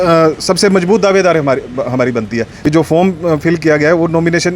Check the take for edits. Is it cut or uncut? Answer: cut